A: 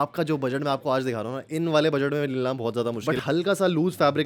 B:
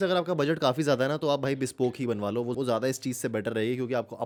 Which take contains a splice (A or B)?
A